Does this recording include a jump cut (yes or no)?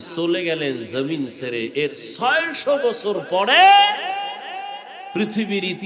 no